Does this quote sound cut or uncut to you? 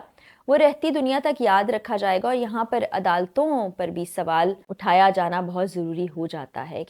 cut